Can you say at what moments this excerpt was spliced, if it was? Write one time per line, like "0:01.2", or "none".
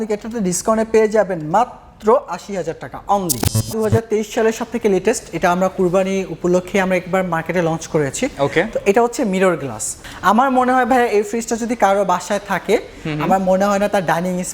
0:03.7
0:10.0